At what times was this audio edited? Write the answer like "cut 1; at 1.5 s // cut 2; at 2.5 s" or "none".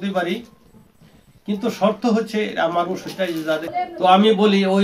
cut 1; at 3.7 s